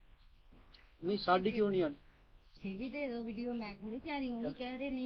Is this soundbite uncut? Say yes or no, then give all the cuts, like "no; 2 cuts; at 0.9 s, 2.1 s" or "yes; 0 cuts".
yes; 0 cuts